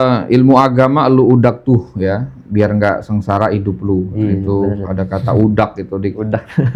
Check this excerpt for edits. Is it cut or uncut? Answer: uncut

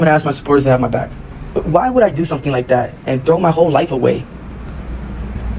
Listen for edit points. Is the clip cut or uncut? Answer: uncut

